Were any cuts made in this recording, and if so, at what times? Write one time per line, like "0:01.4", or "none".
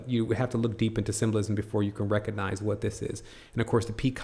0:03.3